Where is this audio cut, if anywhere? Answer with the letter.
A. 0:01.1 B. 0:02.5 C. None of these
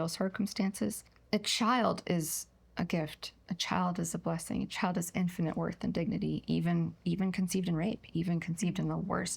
A